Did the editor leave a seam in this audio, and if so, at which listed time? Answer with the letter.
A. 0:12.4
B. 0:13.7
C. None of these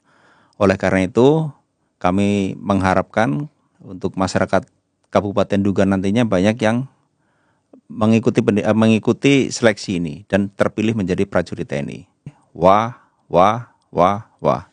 A